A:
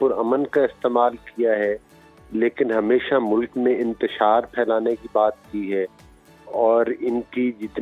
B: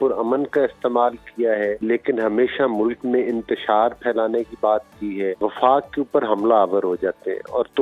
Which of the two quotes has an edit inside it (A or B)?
B